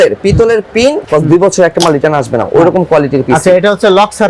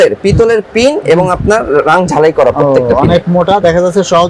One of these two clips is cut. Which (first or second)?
first